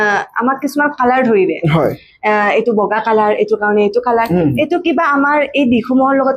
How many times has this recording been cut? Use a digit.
0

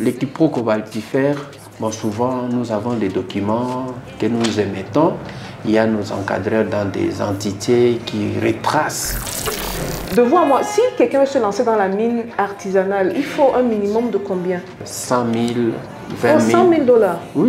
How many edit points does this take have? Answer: 2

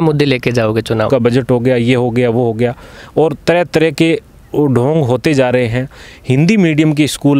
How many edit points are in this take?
1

